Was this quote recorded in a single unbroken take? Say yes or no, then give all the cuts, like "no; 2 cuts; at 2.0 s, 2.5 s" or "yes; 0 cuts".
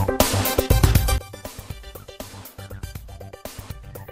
yes; 0 cuts